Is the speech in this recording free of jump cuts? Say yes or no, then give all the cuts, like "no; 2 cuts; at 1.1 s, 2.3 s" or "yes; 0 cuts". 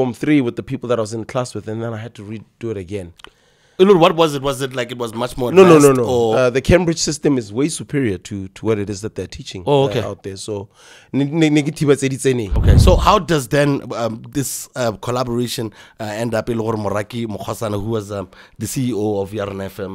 no; 1 cut; at 12.5 s